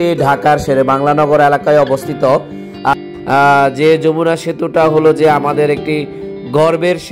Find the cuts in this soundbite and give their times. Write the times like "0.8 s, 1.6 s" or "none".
2.9 s